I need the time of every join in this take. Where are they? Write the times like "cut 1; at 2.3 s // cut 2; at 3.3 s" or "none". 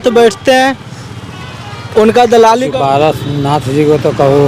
cut 1; at 2.7 s